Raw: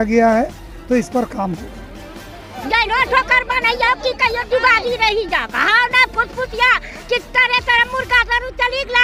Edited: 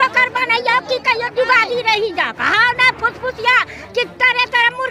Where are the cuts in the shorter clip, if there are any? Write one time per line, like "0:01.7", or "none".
none